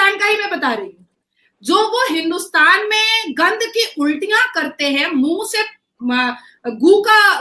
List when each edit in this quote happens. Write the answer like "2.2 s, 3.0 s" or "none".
none